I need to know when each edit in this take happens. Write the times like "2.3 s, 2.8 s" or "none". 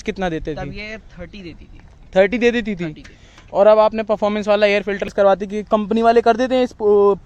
5.1 s